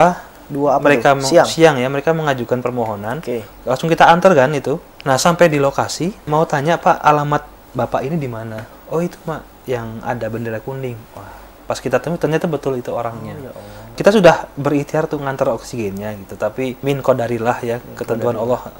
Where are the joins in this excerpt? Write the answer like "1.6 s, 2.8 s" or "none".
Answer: 4.9 s, 6.2 s, 14.0 s, 16.8 s